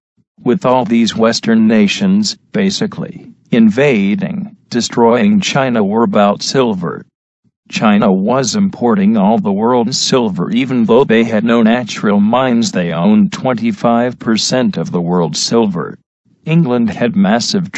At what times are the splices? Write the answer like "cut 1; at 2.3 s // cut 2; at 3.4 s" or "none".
cut 1; at 16.0 s